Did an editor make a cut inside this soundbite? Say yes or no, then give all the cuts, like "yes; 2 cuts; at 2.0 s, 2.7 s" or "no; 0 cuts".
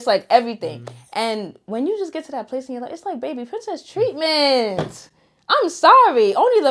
no; 0 cuts